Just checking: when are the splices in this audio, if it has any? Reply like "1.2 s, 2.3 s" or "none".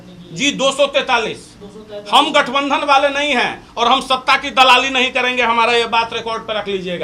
none